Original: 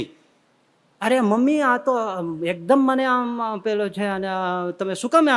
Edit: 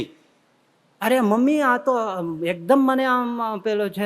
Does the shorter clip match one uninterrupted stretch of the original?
yes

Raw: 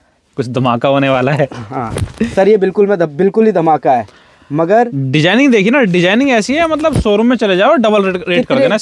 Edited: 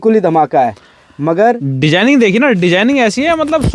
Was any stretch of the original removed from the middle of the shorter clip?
no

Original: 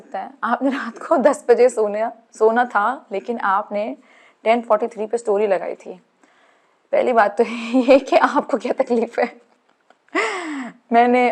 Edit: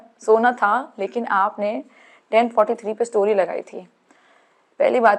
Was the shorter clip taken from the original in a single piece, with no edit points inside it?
yes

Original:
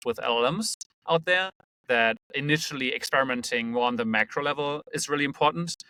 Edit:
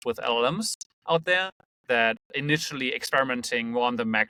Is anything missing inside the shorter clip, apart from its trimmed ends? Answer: no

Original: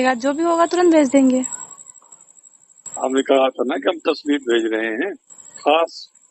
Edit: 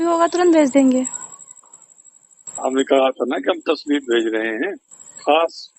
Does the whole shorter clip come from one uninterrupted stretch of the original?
yes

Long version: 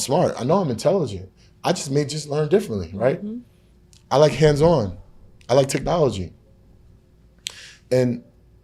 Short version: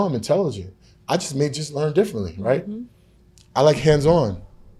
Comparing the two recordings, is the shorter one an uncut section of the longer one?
yes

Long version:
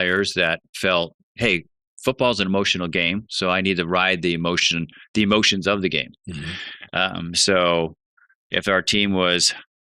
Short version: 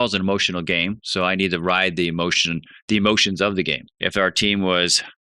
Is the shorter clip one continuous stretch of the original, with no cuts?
no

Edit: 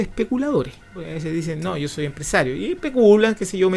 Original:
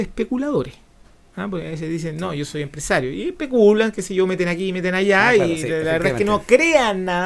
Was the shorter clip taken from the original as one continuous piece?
no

